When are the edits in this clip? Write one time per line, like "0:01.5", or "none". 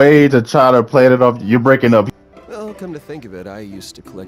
0:02.1